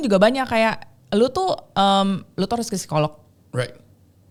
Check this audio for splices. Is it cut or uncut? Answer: uncut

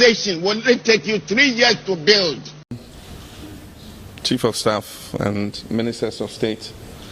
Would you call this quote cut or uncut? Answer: cut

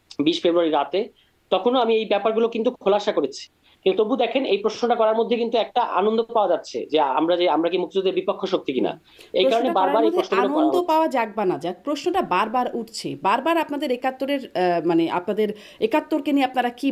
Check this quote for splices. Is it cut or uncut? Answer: uncut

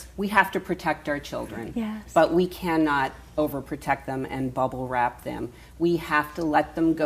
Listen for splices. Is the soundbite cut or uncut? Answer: cut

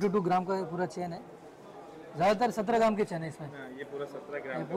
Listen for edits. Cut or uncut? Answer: uncut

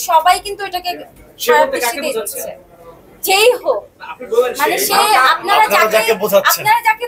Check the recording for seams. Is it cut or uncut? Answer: uncut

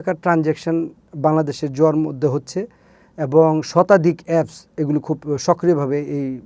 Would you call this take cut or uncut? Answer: uncut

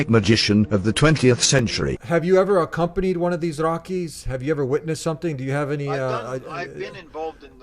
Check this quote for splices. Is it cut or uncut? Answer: cut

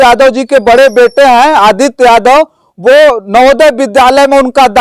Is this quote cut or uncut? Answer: uncut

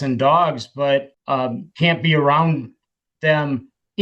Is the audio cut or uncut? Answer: cut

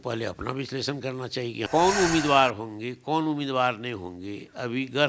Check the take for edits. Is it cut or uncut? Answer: cut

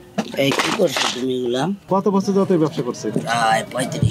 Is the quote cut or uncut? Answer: cut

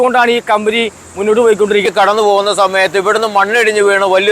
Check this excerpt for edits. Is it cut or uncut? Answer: cut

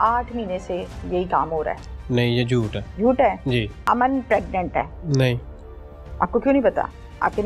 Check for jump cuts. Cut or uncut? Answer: cut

